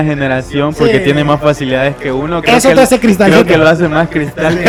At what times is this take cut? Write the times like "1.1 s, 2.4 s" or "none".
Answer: none